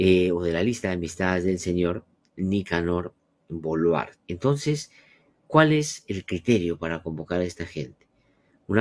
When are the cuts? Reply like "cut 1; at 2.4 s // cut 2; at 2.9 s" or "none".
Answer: cut 1; at 4.2 s